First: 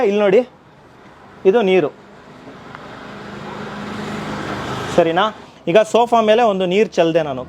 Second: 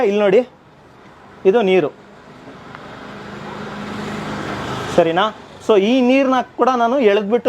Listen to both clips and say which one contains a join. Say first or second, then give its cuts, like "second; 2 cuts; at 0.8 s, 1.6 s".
first; 1 cut; at 5.5 s